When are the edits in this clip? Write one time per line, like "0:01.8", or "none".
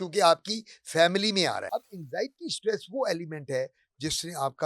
0:01.7